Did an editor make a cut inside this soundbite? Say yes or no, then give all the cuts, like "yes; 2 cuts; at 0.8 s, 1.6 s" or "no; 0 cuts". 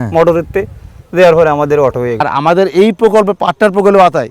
yes; 1 cut; at 2.2 s